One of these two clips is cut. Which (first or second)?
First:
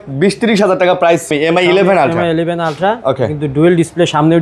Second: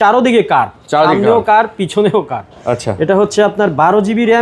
first